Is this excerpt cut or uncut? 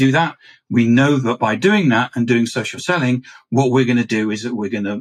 uncut